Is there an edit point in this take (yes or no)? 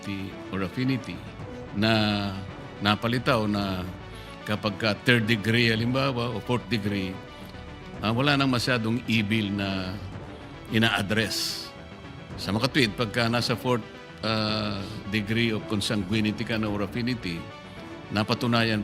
no